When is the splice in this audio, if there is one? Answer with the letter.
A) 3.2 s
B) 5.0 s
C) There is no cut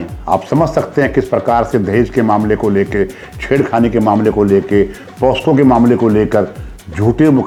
C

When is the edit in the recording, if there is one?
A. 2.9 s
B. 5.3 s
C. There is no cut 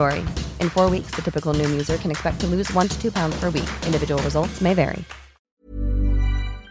B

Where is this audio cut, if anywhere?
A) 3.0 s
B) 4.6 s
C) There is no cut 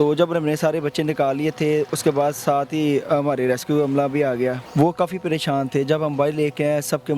B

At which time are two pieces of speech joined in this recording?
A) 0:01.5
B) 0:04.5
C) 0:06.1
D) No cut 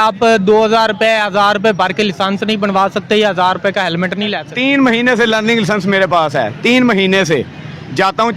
B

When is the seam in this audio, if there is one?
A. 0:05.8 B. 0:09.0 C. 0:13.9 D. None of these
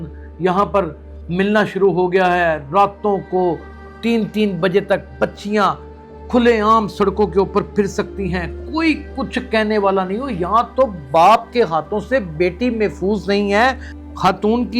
C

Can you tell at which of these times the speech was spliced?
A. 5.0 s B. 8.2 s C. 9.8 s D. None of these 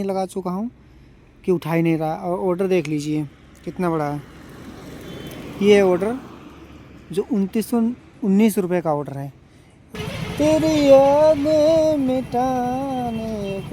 C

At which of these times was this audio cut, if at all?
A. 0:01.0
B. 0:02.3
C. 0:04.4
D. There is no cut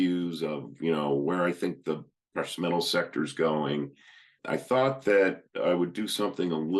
C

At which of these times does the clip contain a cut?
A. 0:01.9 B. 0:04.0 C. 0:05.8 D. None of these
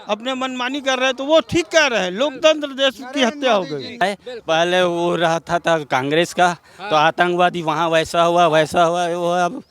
B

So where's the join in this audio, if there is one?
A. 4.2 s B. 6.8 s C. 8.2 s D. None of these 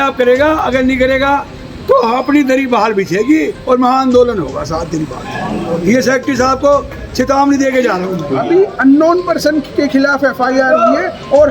C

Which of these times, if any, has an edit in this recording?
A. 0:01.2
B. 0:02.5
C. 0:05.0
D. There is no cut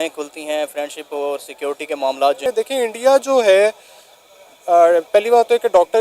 B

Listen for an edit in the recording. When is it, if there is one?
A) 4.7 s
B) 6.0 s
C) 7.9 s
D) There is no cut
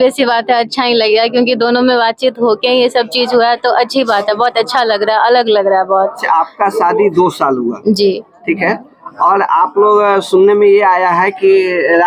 D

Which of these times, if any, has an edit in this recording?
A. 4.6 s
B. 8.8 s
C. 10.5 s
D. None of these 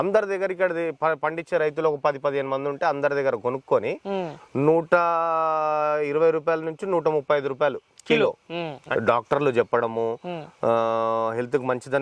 B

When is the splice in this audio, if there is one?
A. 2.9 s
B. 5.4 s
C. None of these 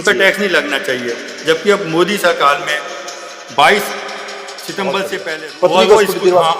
B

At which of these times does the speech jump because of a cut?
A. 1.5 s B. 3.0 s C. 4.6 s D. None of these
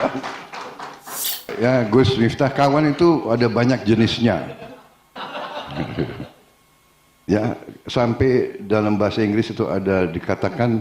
A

